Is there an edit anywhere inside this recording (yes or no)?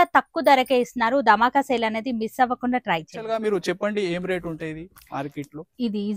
yes